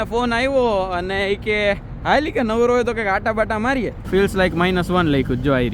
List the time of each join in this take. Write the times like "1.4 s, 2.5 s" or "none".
4.0 s